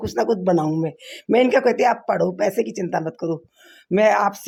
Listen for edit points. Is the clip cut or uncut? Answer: uncut